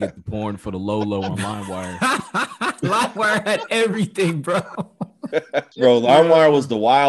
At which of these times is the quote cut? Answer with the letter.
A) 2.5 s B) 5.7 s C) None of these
B